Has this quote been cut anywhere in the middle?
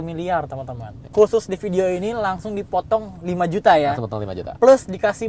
yes; 1 cut; at 1.1 s

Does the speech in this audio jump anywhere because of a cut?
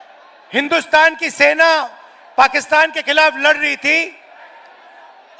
no; 0 cuts

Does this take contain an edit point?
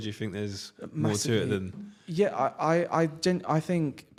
no; 0 cuts

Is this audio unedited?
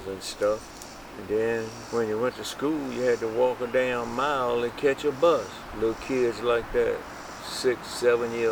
no; 1 cut; at 1.8 s

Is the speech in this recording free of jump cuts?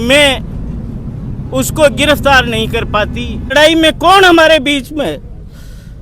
no; 1 cut; at 3.5 s

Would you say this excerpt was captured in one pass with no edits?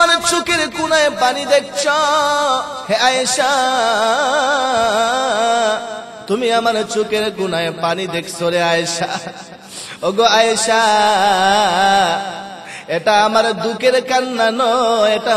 no; 1 cut; at 2.7 s

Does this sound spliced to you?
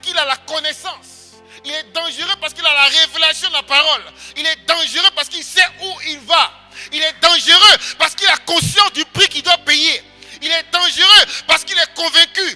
no; 0 cuts

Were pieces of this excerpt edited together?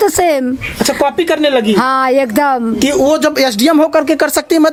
no; 0 cuts

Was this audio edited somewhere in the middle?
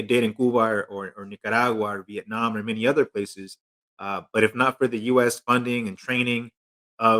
no; 0 cuts

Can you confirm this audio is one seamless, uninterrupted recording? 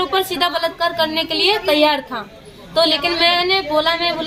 yes; 0 cuts

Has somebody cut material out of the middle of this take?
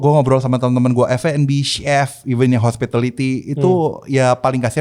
no; 0 cuts

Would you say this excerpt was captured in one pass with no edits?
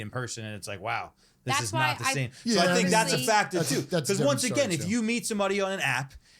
yes; 0 cuts

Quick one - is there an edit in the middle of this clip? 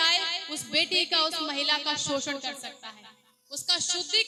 no; 0 cuts

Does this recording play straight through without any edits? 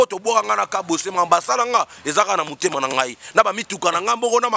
yes; 0 cuts

